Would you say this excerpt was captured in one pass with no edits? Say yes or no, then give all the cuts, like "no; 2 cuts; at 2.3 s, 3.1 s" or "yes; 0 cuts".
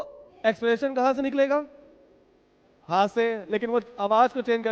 yes; 0 cuts